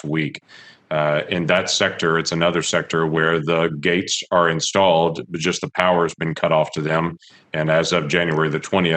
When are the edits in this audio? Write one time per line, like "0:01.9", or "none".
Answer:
none